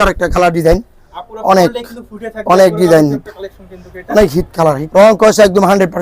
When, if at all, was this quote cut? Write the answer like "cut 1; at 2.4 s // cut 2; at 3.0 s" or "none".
cut 1; at 4.8 s

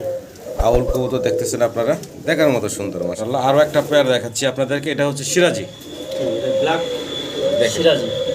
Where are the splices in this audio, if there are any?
cut 1; at 3.2 s

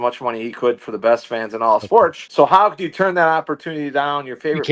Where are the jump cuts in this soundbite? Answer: cut 1; at 2.2 s

